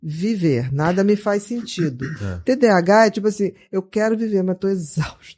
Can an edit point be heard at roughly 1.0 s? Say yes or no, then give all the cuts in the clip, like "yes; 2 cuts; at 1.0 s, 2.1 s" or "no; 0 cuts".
no; 0 cuts